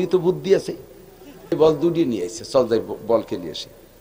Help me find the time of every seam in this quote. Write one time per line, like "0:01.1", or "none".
0:01.5